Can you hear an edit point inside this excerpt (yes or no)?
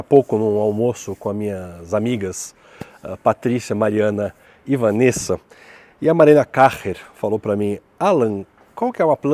no